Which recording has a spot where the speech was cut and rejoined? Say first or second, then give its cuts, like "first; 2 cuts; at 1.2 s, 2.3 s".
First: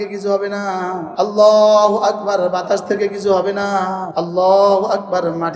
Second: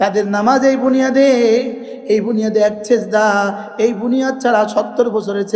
first; 2 cuts; at 1.1 s, 4.0 s